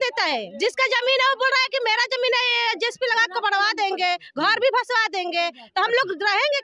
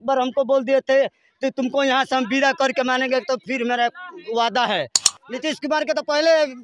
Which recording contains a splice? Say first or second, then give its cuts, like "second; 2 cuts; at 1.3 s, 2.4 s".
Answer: second; 1 cut; at 5.2 s